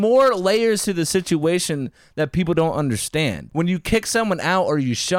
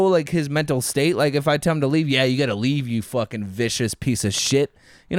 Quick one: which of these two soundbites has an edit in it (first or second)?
first